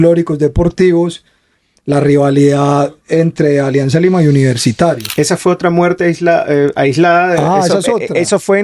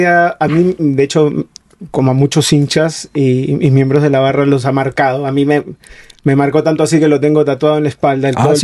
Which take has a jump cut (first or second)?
first